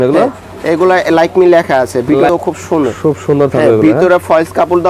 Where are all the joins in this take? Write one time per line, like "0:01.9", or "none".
0:02.3